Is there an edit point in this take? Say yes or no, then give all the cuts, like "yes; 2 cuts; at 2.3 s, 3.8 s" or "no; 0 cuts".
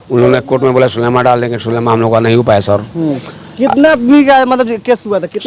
no; 0 cuts